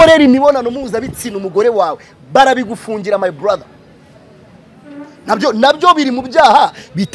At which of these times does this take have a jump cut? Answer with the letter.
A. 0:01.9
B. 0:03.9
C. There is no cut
C